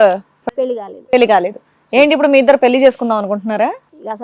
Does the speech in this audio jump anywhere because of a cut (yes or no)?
no